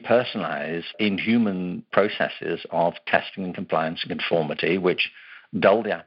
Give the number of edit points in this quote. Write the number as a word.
two